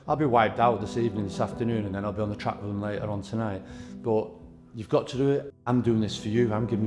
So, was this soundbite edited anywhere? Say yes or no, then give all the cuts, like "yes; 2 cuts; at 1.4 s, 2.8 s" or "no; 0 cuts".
yes; 1 cut; at 5.5 s